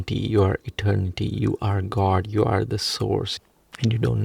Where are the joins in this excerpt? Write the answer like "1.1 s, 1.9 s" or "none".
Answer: 3.3 s

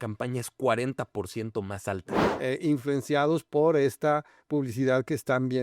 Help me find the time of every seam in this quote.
2.2 s

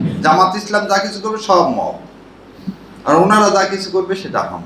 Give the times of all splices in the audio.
none

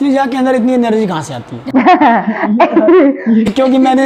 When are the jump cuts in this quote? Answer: none

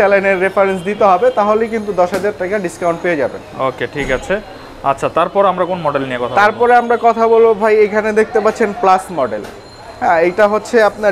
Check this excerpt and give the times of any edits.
none

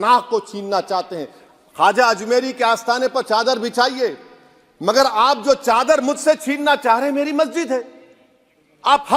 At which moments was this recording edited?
none

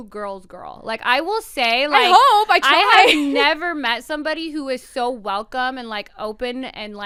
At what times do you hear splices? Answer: none

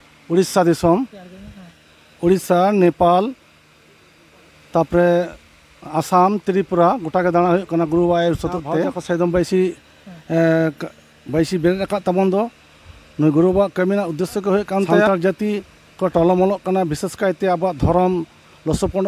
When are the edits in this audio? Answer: 9.0 s, 15.1 s

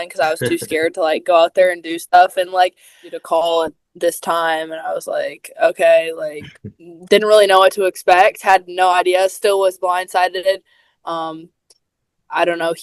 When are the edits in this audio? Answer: 3.1 s

